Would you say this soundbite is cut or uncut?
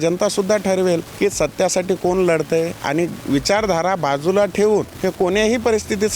cut